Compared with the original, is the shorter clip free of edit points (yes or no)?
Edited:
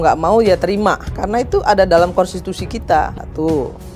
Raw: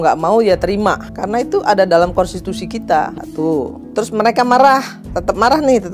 yes